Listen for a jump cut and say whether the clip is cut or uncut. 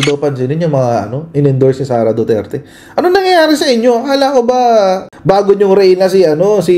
cut